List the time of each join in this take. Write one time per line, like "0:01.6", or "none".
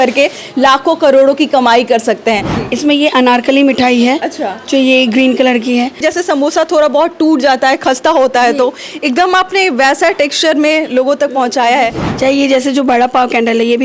0:02.5
0:06.0
0:12.1